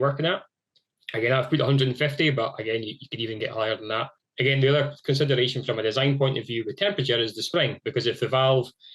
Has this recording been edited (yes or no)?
yes